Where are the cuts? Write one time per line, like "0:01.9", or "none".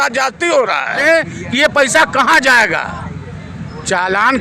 0:01.0